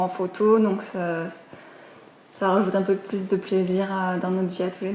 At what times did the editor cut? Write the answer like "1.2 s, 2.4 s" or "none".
none

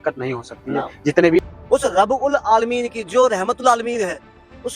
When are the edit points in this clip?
1.4 s

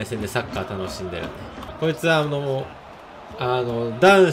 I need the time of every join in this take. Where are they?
1.7 s

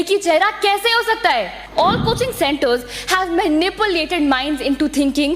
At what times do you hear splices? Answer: 1.6 s

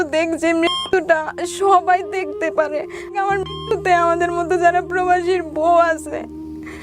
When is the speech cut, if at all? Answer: 3.1 s

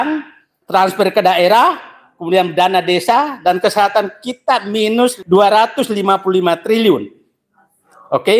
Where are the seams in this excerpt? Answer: 5.2 s

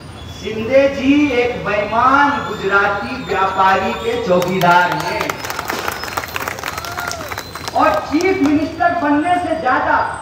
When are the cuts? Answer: none

